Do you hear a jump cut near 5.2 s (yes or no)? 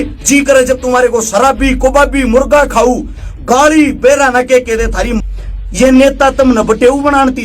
yes